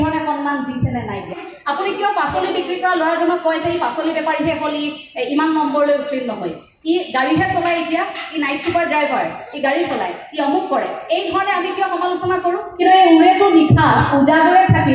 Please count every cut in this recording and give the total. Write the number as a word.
two